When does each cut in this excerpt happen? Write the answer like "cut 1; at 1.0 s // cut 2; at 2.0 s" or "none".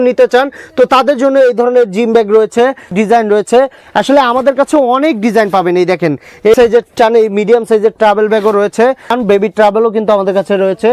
cut 1; at 2.9 s // cut 2; at 6.6 s // cut 3; at 9.2 s